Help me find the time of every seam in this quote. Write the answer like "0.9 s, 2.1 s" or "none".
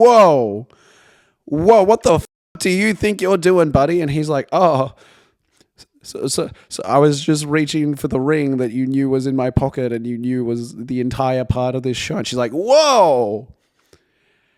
none